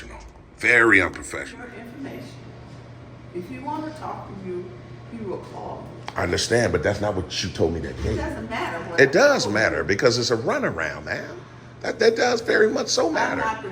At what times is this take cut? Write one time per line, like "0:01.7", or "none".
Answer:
0:01.7